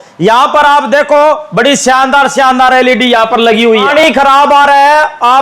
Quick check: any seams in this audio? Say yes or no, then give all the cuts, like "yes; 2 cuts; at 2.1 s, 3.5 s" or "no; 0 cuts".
yes; 1 cut; at 3.8 s